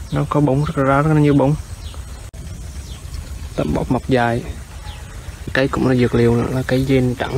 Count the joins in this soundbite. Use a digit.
2